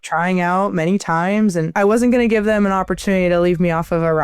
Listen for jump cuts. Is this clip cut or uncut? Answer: cut